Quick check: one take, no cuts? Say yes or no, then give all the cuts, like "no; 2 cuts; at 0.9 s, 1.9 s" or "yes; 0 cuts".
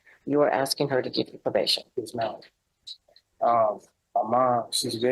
yes; 0 cuts